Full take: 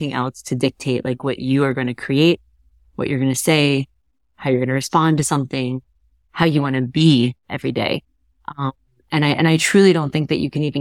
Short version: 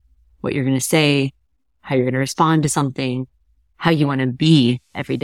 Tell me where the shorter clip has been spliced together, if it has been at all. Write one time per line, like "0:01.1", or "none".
none